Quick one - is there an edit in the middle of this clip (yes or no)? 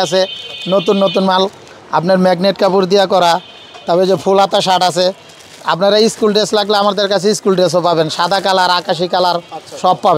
no